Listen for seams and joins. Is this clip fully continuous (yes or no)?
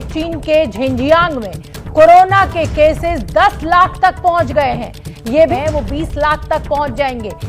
no